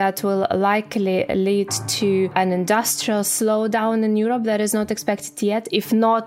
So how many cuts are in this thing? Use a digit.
1